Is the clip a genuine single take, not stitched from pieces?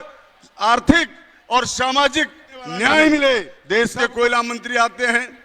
no; 1 cut; at 3.6 s

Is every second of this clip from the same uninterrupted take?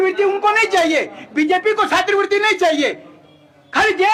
yes; 0 cuts

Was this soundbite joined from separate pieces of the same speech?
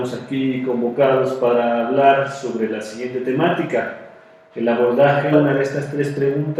no; 0 cuts

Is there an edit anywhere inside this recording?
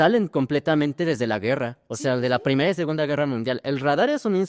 no; 0 cuts

